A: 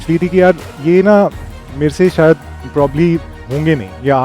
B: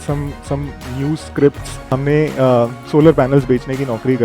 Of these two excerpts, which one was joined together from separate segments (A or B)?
B